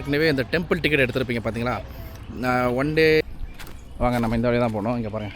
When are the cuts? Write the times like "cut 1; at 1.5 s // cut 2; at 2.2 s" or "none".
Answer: cut 1; at 3.2 s